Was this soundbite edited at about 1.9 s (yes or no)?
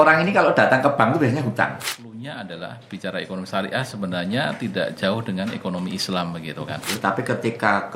yes